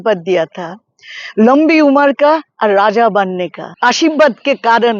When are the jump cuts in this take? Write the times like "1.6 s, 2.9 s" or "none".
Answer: 3.6 s